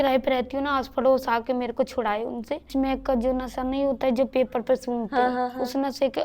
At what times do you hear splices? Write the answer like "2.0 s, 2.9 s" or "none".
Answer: 2.7 s